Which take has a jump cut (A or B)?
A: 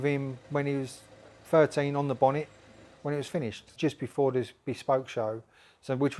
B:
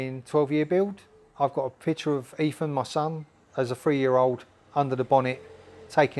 A